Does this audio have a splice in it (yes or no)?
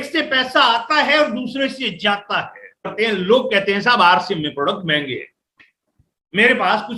yes